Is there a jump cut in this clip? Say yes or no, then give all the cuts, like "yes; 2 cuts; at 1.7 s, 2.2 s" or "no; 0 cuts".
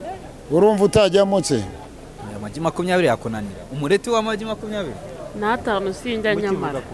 no; 0 cuts